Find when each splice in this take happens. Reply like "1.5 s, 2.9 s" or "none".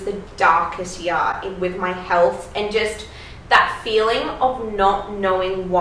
none

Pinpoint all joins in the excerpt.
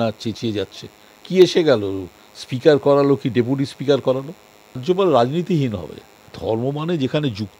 4.8 s, 6.3 s

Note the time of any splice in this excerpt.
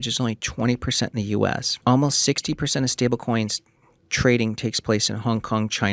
1.7 s

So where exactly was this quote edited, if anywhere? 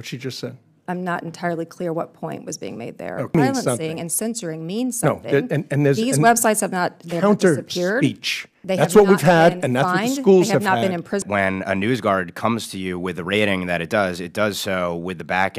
3.3 s, 11.3 s

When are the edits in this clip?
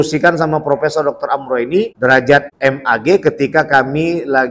1.9 s, 2.5 s

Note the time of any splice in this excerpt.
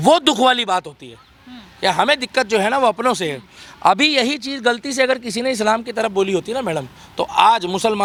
none

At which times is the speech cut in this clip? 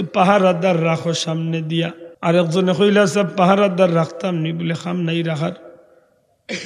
2.0 s

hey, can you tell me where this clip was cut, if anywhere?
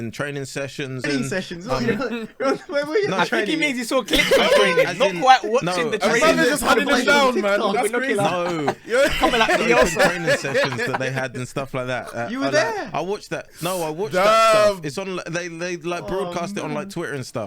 1.1 s

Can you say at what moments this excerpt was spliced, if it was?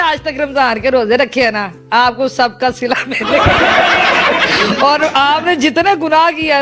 none

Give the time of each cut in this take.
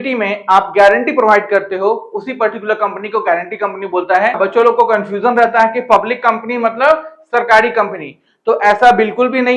4.4 s

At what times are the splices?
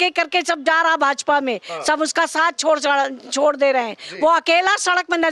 none

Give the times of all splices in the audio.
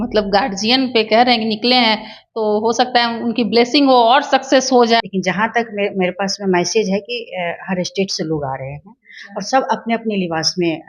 5.1 s

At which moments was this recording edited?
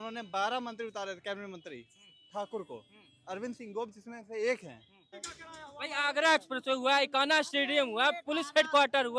5.2 s

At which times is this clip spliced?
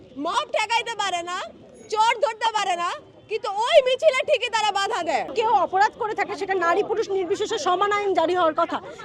5.3 s

